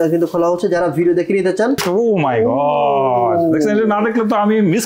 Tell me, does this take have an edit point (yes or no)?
yes